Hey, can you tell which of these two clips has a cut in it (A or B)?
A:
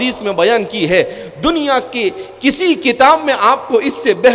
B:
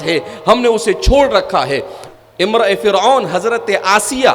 B